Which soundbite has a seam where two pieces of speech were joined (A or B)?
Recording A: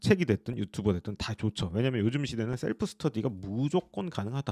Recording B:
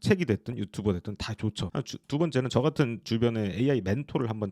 B